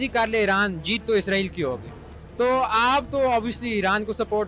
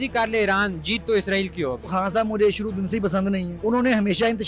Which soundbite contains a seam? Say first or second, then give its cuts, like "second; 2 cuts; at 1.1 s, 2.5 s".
second; 2 cuts; at 1.9 s, 3.5 s